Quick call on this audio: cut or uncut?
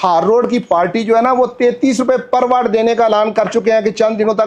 uncut